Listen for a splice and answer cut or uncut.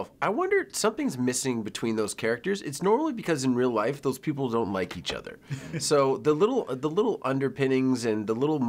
uncut